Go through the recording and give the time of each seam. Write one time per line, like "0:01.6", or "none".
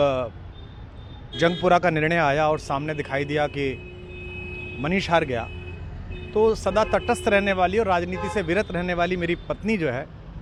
none